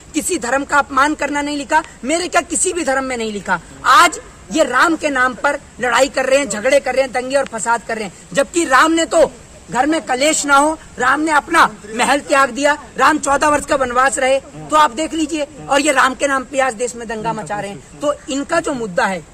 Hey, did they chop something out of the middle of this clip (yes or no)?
no